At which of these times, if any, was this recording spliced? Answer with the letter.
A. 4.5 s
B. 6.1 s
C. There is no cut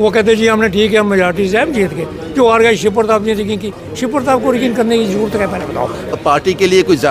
B